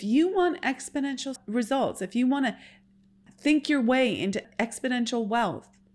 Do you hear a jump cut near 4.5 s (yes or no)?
yes